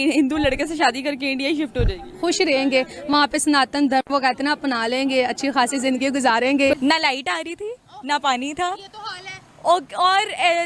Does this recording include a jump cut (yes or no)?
no